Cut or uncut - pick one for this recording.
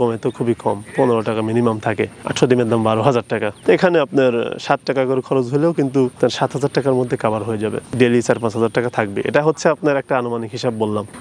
uncut